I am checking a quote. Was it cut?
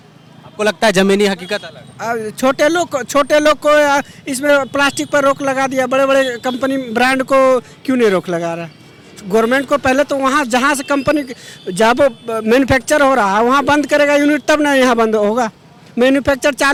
no; 0 cuts

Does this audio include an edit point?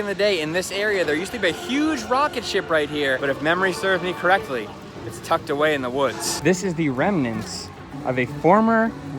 yes; 2 cuts; at 3.2 s, 6.3 s

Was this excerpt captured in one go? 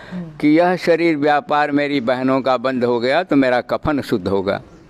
yes; 0 cuts

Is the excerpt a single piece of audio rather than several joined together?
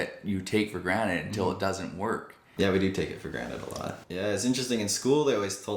no; 2 cuts; at 2.5 s, 4.0 s

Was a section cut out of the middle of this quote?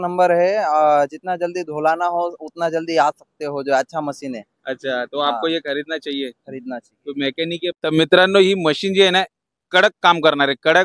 yes; 1 cut; at 7.7 s

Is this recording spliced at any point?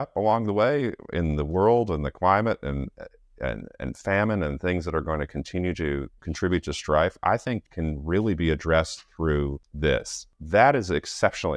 yes; 4 cuts; at 6.2 s, 7.7 s, 9.6 s, 10.3 s

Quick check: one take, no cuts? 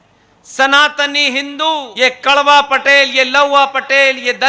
no; 1 cut; at 1.9 s

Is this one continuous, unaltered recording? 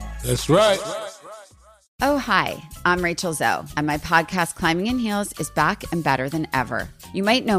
no; 1 cut; at 1.8 s

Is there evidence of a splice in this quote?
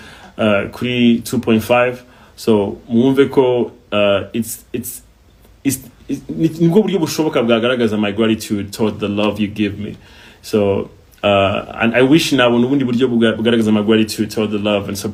no; 0 cuts

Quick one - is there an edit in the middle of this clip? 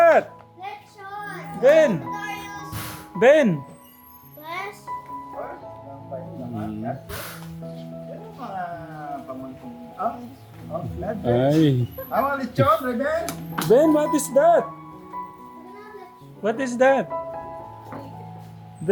no; 0 cuts

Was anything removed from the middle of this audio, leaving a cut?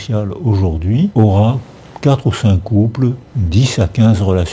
no; 0 cuts

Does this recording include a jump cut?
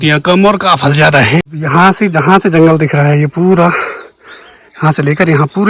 yes; 1 cut; at 1.5 s

